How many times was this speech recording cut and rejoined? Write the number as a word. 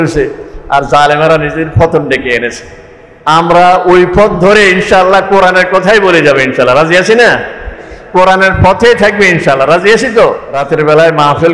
one